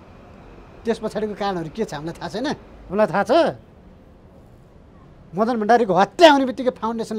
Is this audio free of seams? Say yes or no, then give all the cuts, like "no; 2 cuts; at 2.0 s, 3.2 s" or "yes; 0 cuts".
no; 1 cut; at 2.7 s